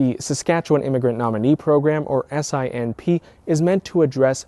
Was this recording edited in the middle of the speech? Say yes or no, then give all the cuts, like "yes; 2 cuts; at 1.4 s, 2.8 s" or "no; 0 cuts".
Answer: no; 0 cuts